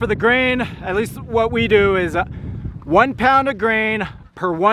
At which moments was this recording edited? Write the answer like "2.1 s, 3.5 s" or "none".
none